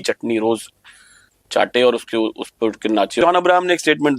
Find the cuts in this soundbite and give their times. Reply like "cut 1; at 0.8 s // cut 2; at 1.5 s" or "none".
cut 1; at 3.2 s

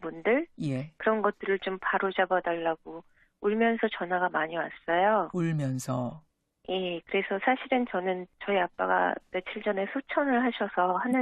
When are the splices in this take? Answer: cut 1; at 6.6 s

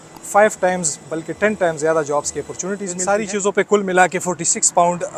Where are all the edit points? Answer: cut 1; at 2.9 s

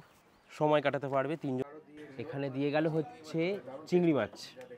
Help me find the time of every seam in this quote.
cut 1; at 1.6 s

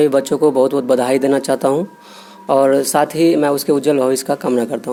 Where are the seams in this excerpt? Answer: none

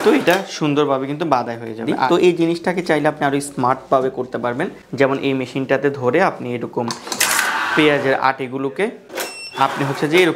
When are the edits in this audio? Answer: cut 1; at 1.9 s // cut 2; at 9.1 s

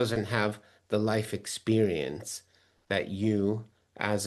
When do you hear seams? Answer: none

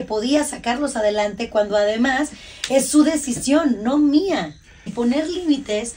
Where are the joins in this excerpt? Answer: cut 1; at 4.8 s

